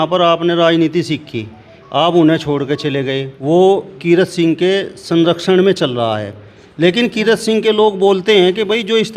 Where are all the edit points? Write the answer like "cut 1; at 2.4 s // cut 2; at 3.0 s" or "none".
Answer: cut 1; at 3.3 s